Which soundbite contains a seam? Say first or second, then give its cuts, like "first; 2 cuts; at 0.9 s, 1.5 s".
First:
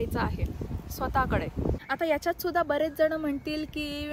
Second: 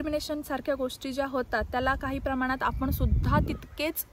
first; 1 cut; at 1.8 s